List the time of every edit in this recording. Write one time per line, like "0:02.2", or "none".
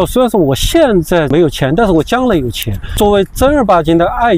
0:01.3
0:02.9